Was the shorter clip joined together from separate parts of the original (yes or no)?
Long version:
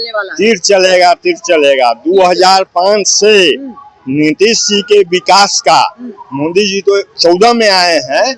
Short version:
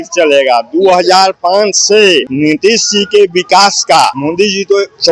yes